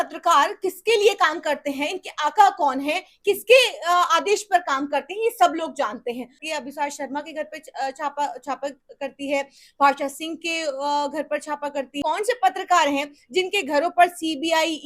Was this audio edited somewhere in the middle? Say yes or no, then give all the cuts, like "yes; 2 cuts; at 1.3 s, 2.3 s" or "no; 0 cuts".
yes; 2 cuts; at 6.4 s, 12.0 s